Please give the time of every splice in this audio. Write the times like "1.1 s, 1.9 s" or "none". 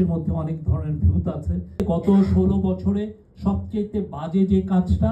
1.7 s